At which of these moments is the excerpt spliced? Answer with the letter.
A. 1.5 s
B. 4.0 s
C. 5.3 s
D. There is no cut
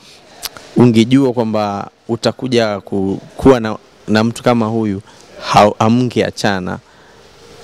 D